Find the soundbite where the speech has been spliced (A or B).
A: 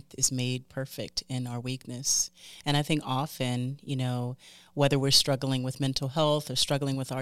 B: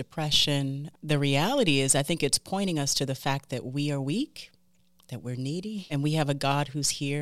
B